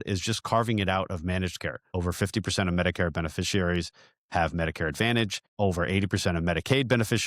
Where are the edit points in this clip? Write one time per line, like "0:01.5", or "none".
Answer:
0:05.4